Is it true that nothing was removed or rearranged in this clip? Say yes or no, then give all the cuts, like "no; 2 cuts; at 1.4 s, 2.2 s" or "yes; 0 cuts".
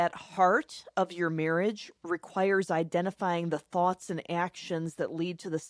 yes; 0 cuts